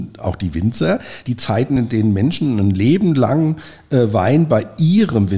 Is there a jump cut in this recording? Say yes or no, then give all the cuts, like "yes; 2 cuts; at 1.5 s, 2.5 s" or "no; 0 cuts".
no; 0 cuts